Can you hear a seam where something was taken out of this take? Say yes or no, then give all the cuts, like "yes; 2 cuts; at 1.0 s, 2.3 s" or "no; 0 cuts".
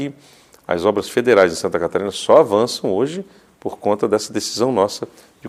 no; 0 cuts